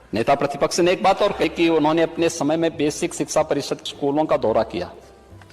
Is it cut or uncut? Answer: cut